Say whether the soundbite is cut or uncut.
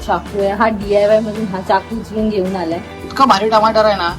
cut